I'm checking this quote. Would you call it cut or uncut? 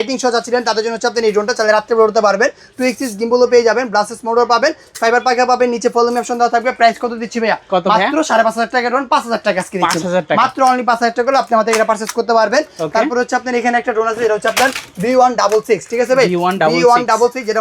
uncut